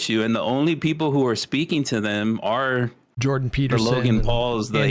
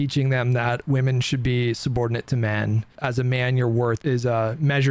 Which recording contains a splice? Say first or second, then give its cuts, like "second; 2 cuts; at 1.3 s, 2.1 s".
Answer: second; 2 cuts; at 2.9 s, 4.0 s